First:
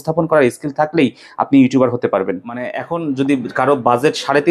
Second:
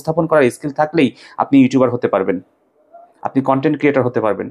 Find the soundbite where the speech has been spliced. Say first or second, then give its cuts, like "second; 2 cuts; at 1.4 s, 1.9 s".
first; 1 cut; at 2.8 s